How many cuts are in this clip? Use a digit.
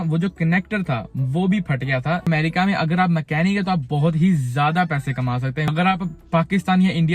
2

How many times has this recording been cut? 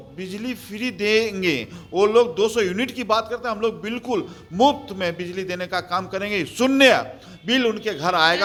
0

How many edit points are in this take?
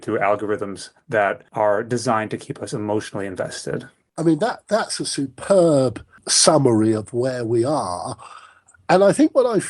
0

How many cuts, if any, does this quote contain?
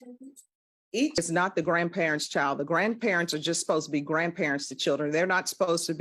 1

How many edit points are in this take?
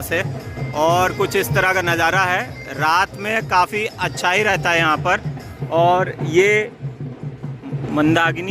0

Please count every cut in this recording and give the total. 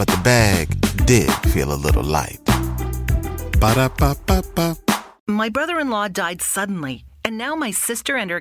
1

